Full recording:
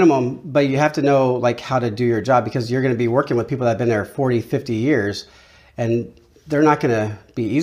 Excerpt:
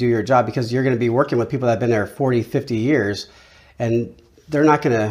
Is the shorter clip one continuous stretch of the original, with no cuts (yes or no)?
yes